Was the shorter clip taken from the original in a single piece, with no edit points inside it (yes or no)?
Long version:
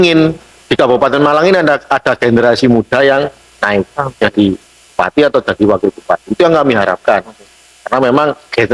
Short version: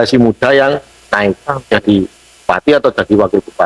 yes